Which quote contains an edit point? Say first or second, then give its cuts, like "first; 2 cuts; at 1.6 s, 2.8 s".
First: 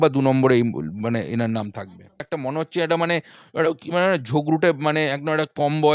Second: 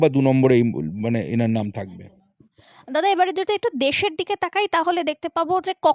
first; 1 cut; at 2.3 s